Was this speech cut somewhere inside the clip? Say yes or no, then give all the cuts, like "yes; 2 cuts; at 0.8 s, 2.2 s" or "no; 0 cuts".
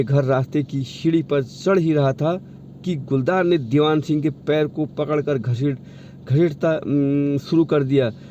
no; 0 cuts